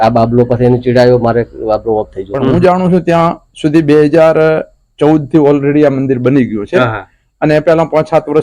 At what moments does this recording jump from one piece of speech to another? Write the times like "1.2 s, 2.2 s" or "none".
2.5 s

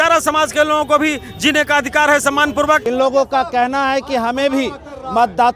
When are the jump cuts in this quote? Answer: 2.8 s

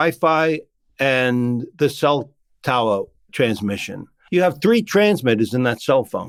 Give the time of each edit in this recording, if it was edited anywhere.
none

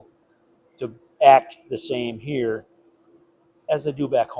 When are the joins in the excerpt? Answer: none

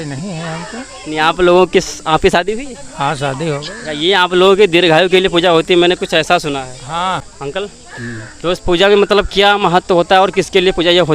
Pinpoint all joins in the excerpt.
7.2 s

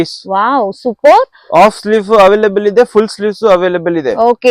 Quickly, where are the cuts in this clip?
none

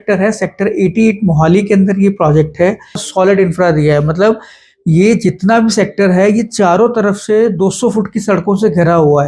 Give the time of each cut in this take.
3.1 s

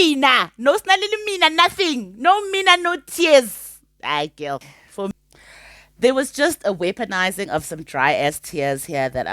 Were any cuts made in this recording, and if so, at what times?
5.1 s

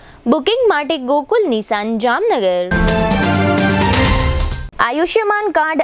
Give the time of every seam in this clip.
2.7 s, 4.5 s

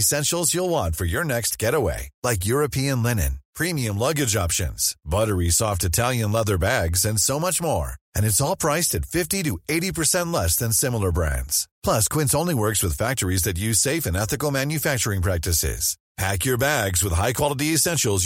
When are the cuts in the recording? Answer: none

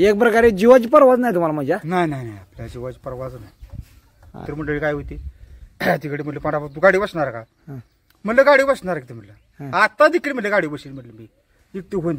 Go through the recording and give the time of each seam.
4.4 s

